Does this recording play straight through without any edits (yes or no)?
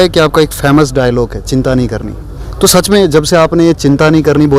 yes